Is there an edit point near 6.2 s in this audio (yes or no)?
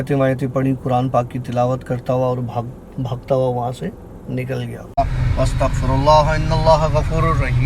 no